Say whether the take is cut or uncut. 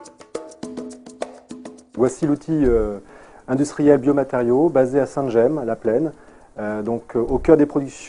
cut